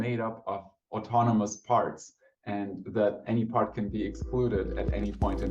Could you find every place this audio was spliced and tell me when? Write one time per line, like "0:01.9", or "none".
none